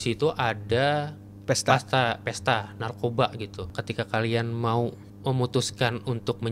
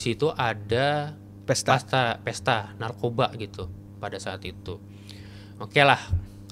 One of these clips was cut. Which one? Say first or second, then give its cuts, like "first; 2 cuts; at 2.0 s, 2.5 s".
first; 2 cuts; at 3.7 s, 5.1 s